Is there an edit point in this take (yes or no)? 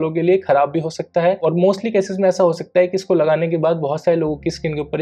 no